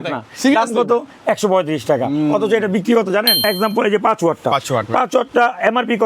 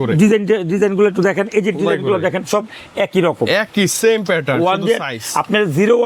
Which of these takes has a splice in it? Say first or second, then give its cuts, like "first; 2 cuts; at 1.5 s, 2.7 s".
first; 1 cut; at 3.4 s